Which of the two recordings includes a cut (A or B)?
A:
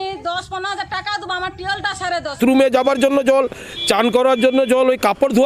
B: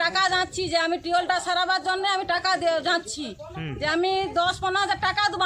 A